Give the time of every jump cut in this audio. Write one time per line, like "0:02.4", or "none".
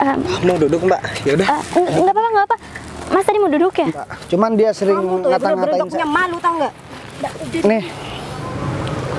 0:04.1